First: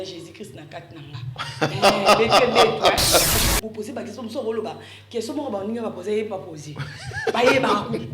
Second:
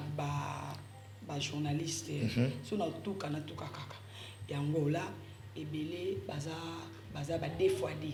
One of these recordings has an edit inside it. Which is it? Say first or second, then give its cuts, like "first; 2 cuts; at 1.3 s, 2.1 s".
first; 1 cut; at 3.3 s